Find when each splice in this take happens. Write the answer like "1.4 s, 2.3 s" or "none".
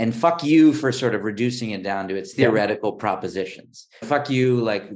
4.0 s